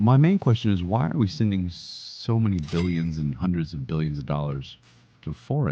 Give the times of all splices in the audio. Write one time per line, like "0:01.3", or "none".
none